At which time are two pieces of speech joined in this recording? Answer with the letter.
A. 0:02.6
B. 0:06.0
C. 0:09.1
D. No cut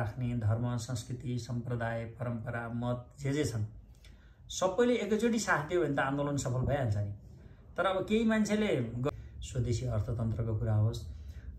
C